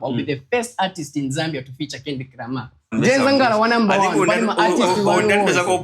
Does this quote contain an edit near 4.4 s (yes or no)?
no